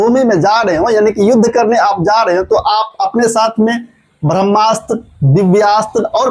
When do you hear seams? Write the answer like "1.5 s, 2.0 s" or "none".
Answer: none